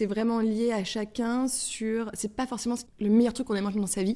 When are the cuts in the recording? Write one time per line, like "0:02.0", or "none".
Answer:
0:02.9